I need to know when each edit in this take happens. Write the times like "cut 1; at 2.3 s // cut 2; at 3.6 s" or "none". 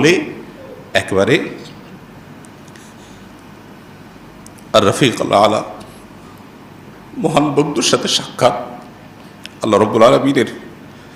cut 1; at 2.2 s

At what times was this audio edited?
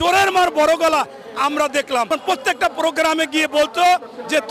cut 1; at 2.1 s

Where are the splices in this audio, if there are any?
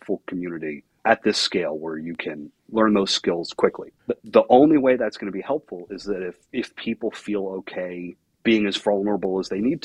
cut 1; at 0.9 s // cut 2; at 2.5 s // cut 3; at 3.9 s // cut 4; at 6.4 s // cut 5; at 8.2 s

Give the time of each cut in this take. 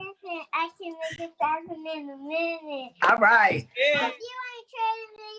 cut 1; at 3.9 s

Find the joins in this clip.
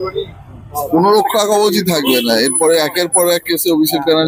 none

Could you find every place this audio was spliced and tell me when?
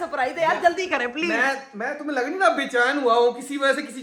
none

